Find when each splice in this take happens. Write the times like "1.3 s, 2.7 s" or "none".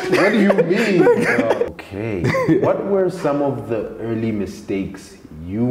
1.7 s